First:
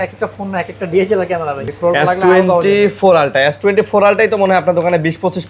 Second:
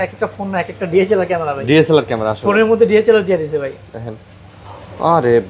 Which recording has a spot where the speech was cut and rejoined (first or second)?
first